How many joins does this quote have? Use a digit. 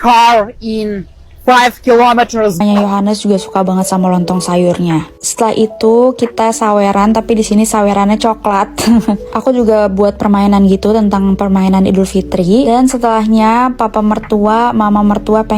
1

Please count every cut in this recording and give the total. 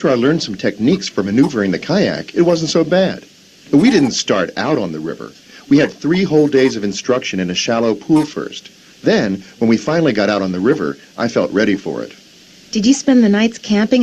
2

